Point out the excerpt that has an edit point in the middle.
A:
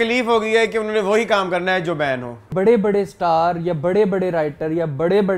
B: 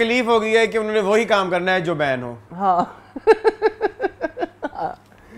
A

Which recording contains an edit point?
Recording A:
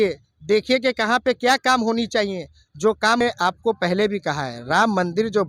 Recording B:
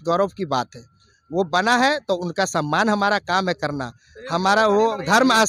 A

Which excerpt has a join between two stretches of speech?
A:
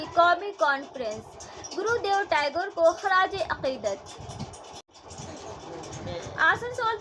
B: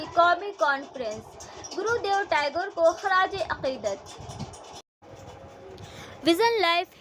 A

